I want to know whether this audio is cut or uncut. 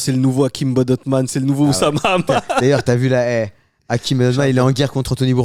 uncut